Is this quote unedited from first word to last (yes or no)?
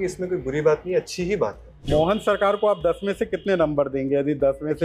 no